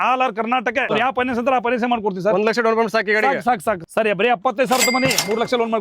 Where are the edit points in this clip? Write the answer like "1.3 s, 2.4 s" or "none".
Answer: 0.9 s, 3.8 s